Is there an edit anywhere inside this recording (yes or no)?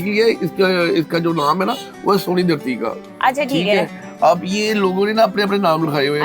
no